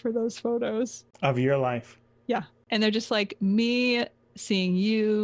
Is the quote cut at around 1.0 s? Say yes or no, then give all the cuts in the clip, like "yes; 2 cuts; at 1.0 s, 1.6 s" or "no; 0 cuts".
yes; 2 cuts; at 1.0 s, 2.6 s